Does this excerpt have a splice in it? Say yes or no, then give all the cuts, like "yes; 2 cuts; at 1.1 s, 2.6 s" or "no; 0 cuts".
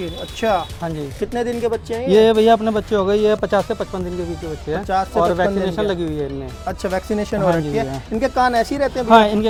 no; 0 cuts